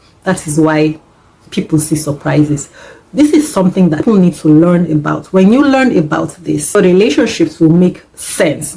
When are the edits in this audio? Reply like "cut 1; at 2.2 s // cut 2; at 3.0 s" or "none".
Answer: cut 1; at 4.0 s // cut 2; at 6.7 s